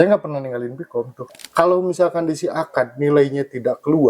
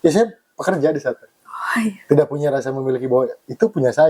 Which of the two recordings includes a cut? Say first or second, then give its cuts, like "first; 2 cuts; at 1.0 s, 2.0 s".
first; 1 cut; at 1.3 s